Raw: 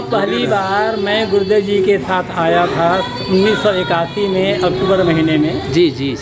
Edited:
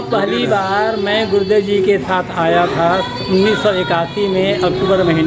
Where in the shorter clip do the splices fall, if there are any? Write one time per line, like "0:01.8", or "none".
none